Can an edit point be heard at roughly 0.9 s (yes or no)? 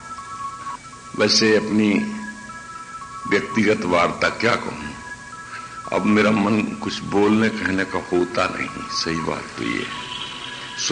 yes